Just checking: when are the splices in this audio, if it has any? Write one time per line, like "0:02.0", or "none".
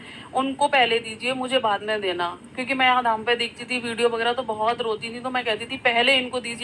none